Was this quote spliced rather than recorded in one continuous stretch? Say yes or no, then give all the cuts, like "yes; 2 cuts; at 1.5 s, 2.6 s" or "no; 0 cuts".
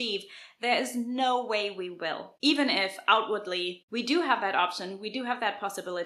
yes; 2 cuts; at 2.3 s, 3.8 s